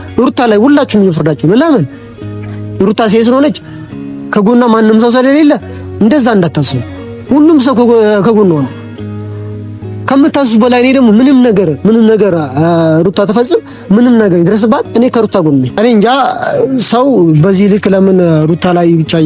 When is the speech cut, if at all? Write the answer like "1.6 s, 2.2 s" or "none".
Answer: 15.7 s